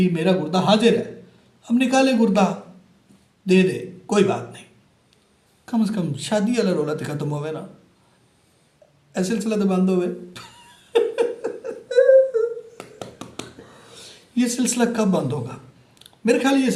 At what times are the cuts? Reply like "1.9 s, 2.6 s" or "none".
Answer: none